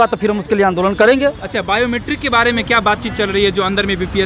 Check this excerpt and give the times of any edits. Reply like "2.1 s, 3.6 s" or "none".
none